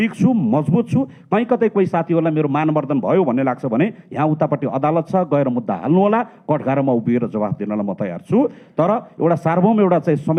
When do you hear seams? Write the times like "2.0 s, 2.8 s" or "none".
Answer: none